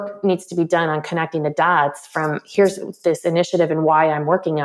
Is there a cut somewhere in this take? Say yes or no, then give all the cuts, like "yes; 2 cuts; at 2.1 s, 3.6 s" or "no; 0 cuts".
no; 0 cuts